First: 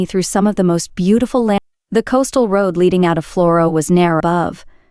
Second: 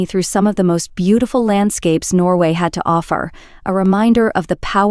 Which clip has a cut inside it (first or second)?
first